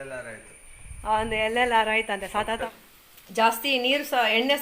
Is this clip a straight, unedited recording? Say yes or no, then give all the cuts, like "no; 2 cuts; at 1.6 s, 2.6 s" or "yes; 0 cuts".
no; 1 cut; at 2.5 s